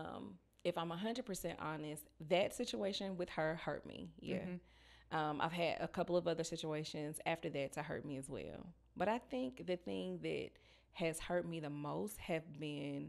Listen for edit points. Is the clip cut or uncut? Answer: uncut